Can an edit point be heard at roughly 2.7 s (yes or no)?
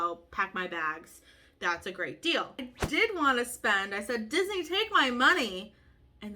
yes